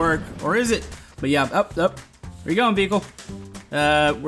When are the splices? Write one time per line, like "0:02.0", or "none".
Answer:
0:01.0